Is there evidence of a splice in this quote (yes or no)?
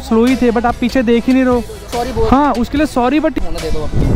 yes